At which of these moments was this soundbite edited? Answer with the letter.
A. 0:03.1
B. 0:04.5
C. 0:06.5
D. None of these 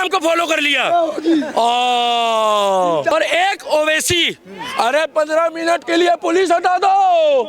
A